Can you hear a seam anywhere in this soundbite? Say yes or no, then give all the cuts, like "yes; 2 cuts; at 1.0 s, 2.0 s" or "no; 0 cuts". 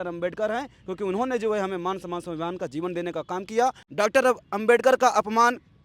yes; 1 cut; at 3.8 s